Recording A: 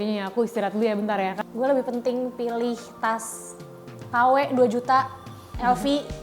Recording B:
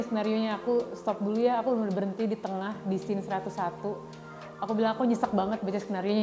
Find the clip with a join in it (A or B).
A